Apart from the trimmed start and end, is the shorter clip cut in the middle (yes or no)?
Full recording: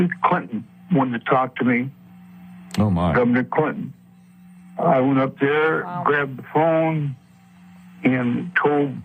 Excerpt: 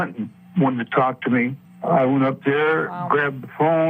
yes